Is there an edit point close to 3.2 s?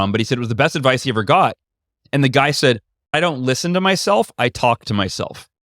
yes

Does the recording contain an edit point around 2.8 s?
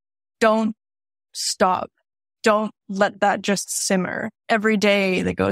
no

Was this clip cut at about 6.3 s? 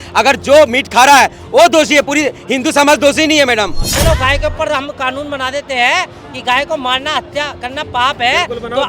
no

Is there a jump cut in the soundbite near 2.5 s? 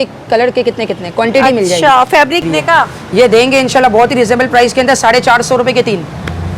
yes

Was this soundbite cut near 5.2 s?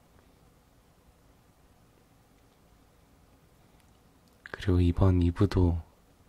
yes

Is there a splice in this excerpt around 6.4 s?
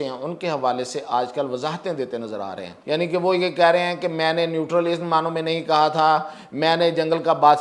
no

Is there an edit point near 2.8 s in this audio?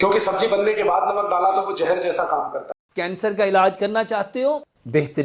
yes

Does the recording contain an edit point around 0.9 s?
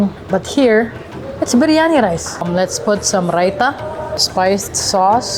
no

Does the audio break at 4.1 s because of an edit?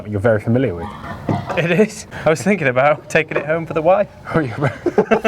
no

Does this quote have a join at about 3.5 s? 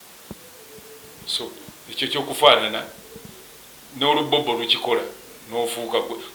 no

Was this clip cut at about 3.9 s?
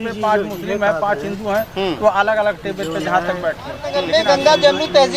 yes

